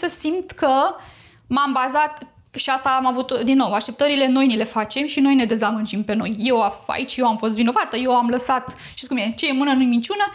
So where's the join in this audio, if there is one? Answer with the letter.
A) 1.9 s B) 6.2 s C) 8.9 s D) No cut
D